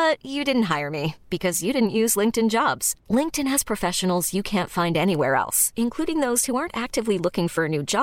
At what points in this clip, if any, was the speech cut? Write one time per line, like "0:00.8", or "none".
none